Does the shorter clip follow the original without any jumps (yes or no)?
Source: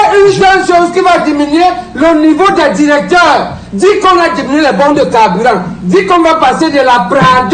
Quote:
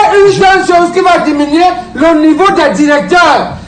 yes